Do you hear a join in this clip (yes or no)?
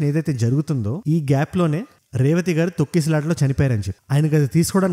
no